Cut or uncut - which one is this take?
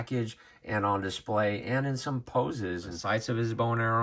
cut